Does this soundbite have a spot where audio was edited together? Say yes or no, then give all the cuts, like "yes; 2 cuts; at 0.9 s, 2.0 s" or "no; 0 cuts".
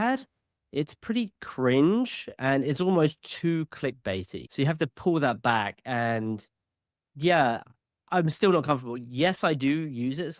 no; 0 cuts